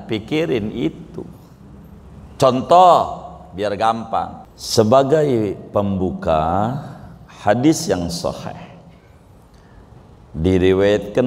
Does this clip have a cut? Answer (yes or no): yes